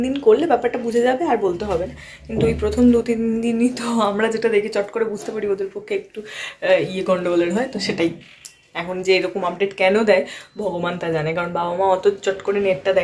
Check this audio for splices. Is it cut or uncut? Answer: uncut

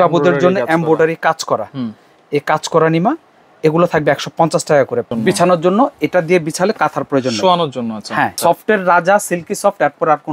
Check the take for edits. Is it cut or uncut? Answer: cut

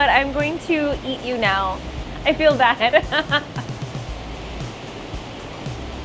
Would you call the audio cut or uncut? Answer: uncut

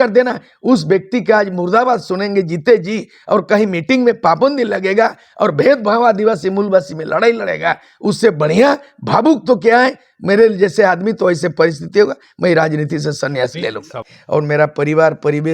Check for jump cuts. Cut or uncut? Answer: cut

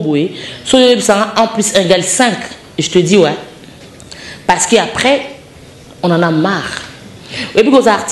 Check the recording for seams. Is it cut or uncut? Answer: uncut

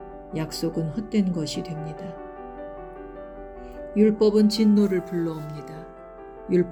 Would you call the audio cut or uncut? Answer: uncut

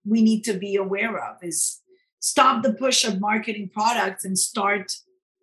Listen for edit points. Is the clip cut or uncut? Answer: uncut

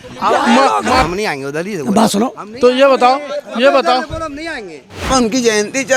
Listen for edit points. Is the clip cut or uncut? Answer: cut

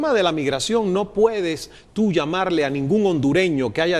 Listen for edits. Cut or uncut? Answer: uncut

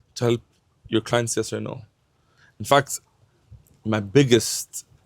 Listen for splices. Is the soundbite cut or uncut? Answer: uncut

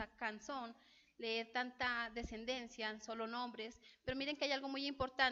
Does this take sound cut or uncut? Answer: cut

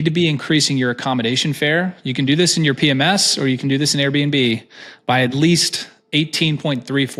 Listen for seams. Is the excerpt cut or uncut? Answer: uncut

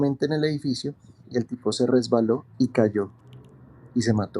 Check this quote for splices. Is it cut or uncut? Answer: uncut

